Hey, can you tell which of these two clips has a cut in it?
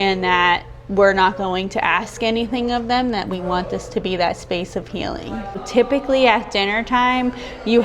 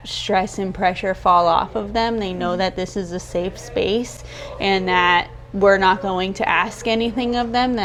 first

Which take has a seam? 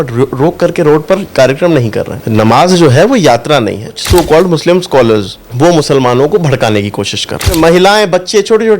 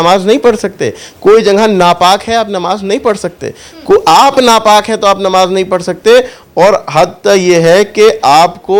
first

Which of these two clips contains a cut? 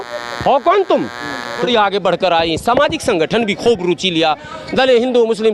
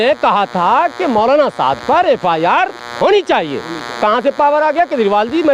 first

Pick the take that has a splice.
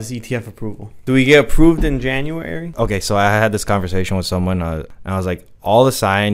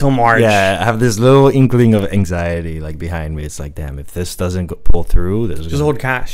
first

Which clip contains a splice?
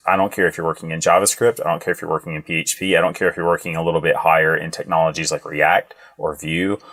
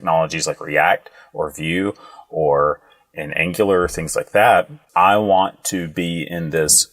second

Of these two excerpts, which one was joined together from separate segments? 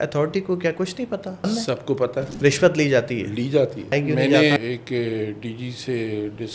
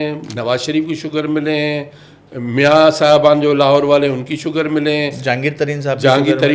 first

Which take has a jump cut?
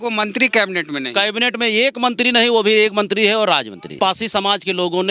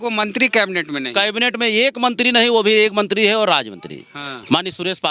first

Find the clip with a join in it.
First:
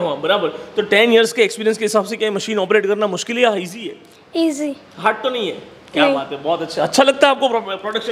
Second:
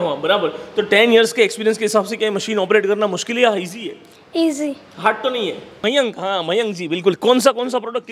second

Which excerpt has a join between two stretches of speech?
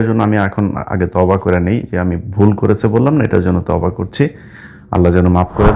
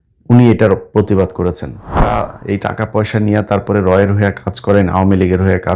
second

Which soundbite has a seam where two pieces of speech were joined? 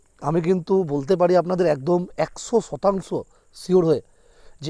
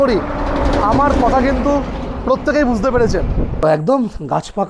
second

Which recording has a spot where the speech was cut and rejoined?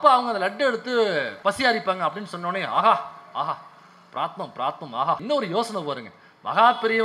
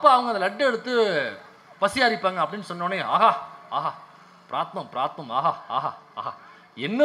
first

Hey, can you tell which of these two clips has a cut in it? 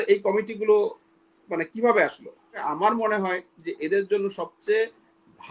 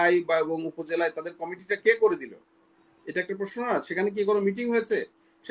first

